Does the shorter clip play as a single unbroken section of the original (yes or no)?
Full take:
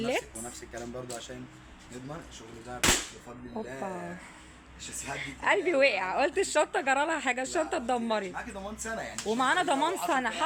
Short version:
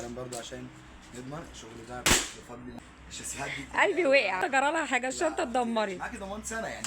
no